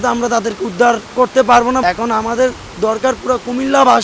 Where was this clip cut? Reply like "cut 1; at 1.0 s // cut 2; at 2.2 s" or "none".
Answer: cut 1; at 1.8 s